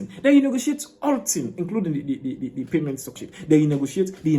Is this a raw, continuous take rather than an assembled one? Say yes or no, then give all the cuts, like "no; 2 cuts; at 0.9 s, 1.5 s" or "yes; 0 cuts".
no; 1 cut; at 3.2 s